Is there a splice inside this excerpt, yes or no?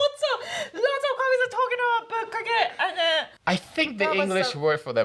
yes